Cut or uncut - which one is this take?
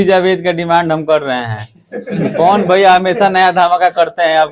uncut